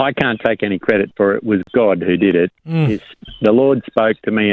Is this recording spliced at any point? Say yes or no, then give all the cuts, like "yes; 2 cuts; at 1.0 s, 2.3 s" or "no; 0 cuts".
no; 0 cuts